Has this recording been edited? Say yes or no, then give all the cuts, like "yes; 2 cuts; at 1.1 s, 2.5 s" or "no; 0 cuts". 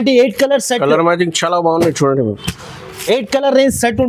no; 0 cuts